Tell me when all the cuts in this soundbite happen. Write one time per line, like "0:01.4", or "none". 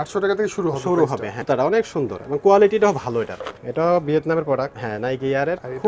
0:01.4
0:04.8